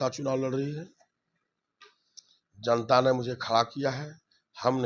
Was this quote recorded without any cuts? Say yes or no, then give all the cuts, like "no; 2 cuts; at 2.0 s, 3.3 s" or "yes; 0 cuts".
yes; 0 cuts